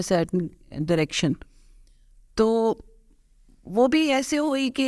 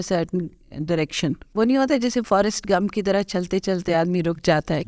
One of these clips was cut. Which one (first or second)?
second